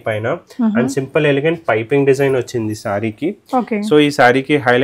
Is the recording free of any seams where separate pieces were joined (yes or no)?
yes